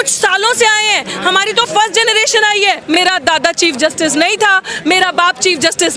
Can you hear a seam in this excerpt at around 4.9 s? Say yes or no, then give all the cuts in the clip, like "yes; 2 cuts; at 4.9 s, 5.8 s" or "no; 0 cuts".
no; 1 cut; at 3.0 s